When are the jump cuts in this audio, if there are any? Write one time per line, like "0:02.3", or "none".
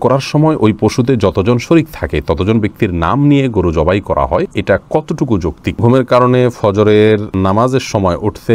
0:04.5
0:05.8
0:07.3